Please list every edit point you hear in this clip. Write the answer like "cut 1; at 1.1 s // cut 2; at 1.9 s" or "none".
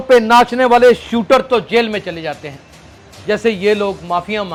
none